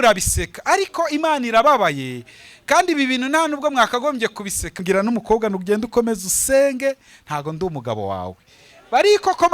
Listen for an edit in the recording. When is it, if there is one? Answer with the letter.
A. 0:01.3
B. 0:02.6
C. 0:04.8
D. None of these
C